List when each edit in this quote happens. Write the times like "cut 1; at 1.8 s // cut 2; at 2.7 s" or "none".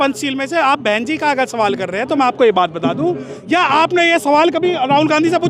cut 1; at 3.3 s